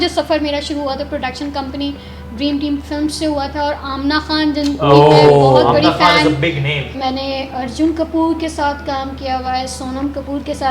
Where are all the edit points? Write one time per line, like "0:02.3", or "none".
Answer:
0:06.9